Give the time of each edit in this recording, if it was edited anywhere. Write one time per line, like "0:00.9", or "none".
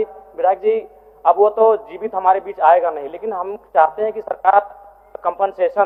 none